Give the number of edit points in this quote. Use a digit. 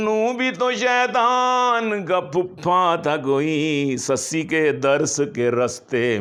0